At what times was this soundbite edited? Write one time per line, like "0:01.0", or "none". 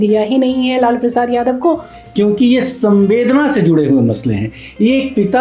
0:01.9